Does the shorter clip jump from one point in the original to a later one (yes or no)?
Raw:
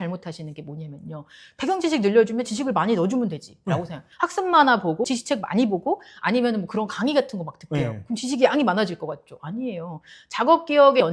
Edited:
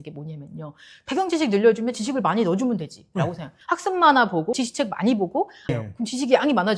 yes